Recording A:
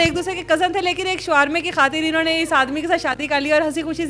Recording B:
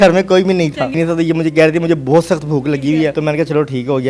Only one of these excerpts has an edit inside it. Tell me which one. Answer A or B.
B